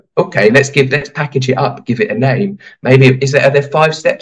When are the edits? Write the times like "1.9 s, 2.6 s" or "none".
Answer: none